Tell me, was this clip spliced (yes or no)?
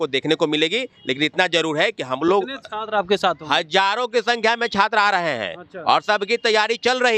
no